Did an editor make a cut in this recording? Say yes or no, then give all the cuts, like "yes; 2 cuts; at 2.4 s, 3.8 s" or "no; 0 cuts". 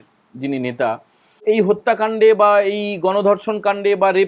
yes; 1 cut; at 1.4 s